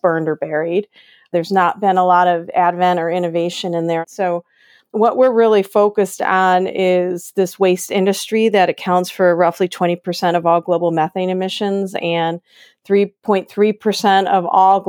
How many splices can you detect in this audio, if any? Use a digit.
1